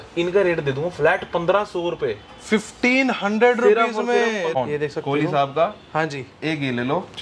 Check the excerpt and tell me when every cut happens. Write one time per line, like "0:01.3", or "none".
0:04.6